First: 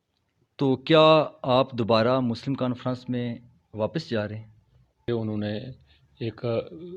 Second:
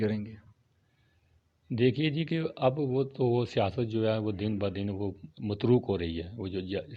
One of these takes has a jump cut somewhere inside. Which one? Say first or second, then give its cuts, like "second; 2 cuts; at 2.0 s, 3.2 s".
first; 1 cut; at 5.1 s